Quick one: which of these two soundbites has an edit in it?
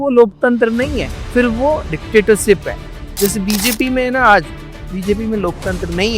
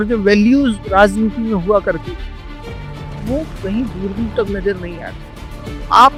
first; 1 cut; at 1.1 s

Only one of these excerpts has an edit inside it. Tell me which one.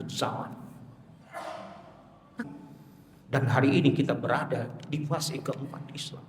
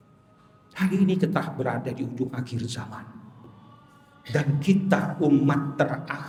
first; 1 cut; at 2.4 s

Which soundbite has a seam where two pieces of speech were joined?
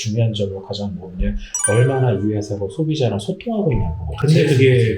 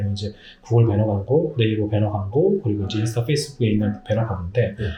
first; 1 cut; at 4.0 s

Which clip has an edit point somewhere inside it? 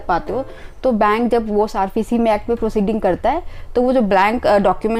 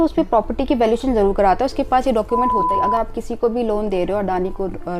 second; 1 cut; at 2.7 s

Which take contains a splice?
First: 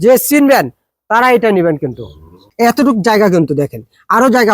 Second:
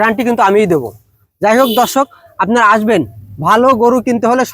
first; 1 cut; at 2.4 s

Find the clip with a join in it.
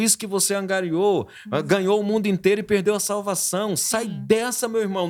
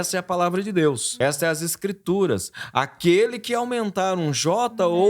second; 1 cut; at 1.1 s

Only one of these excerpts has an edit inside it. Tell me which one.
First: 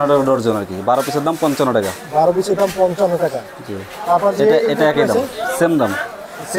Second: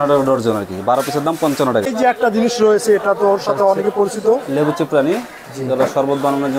second; 1 cut; at 1.9 s

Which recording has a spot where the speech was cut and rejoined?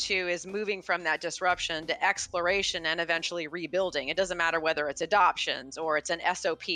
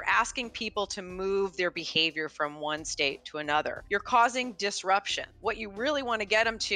second; 2 cuts; at 3.8 s, 5.2 s

